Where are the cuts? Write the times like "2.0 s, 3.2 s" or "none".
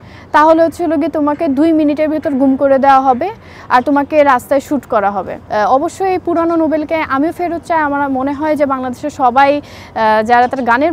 5.4 s